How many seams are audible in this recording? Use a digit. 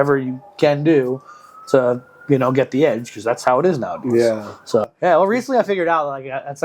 1